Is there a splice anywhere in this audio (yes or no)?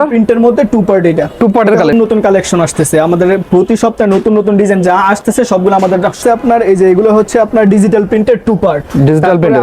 yes